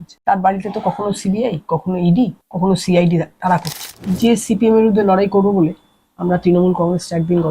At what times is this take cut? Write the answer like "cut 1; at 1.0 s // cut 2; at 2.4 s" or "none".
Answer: cut 1; at 4.0 s